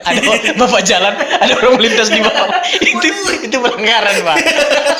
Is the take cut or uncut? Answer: uncut